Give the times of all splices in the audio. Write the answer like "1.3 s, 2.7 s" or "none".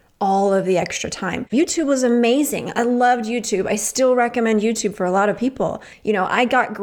1.5 s